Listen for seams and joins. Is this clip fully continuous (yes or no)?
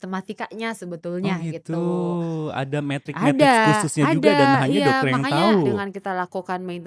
no